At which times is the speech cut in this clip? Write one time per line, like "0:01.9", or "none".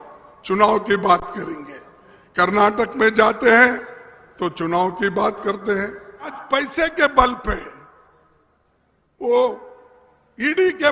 0:06.4